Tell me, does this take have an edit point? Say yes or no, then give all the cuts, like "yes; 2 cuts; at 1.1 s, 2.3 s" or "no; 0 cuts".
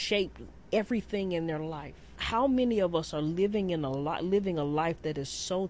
yes; 1 cut; at 2.2 s